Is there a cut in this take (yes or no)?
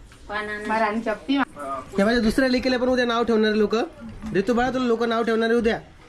yes